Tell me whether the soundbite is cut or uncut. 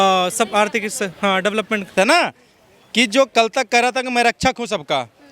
cut